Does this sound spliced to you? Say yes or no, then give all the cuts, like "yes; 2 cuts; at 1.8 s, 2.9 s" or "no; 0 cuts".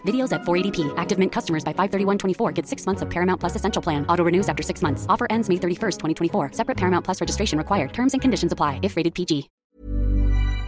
yes; 1 cut; at 9.6 s